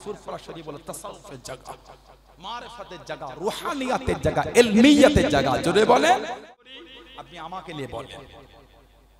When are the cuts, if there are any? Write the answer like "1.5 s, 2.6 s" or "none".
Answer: 6.4 s